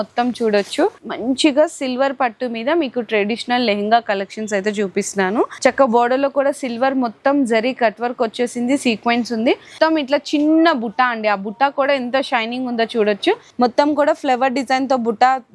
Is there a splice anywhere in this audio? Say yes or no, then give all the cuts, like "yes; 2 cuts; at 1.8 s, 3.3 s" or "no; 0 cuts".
yes; 4 cuts; at 1.1 s, 5.5 s, 9.7 s, 13.5 s